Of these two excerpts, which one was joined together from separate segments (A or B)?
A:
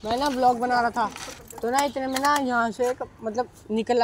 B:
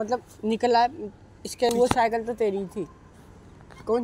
B